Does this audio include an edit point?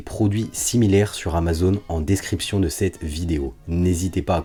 no; 0 cuts

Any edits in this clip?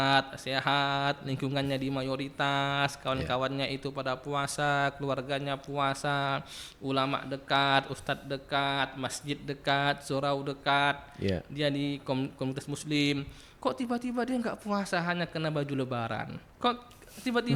no; 0 cuts

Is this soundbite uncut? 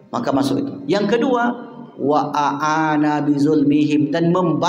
yes; 0 cuts

